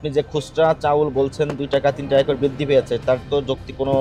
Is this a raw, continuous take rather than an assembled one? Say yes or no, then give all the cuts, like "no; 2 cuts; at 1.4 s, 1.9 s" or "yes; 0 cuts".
yes; 0 cuts